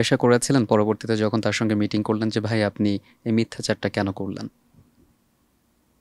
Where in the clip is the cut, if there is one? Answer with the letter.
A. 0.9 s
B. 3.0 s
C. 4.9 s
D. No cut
D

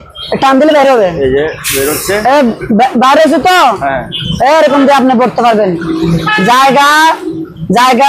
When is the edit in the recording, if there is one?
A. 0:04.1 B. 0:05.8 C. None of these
C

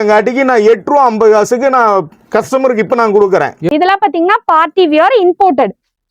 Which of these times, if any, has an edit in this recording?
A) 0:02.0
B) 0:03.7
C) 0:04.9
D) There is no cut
B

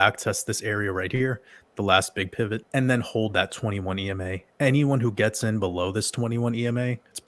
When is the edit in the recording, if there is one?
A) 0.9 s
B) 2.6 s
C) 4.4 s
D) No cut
B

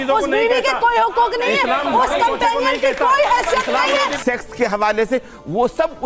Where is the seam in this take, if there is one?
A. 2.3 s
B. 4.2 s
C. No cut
B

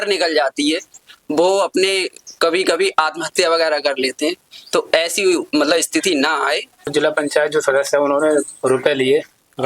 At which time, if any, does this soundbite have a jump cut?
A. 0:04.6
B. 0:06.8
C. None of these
B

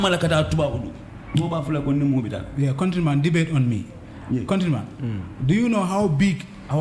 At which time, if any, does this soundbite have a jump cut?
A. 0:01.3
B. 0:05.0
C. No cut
A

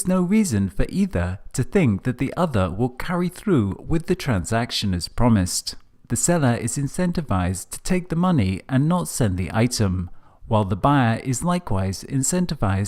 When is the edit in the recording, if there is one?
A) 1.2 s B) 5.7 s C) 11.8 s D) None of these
A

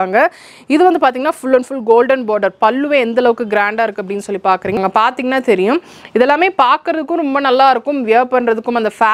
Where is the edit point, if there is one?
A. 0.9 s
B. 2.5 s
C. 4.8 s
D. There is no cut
C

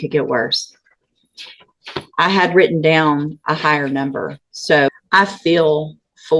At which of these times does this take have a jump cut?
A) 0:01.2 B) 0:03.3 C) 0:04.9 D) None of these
C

